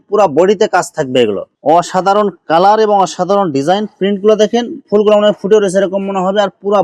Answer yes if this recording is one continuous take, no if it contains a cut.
no